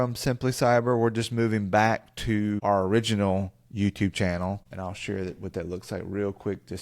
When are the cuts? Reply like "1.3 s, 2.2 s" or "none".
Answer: 2.6 s, 4.7 s